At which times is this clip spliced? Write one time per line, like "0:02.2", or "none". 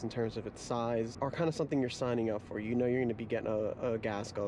0:01.1